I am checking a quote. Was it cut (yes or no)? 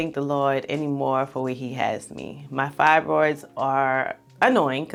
no